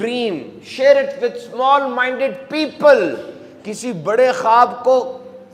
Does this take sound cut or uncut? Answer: uncut